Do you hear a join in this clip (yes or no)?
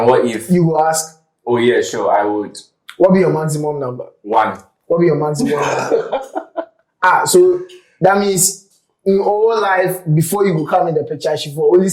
no